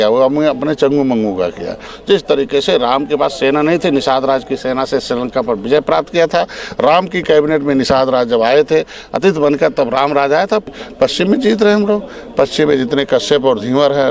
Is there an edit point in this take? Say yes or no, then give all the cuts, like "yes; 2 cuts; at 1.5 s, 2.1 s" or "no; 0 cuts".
yes; 2 cuts; at 1.9 s, 10.7 s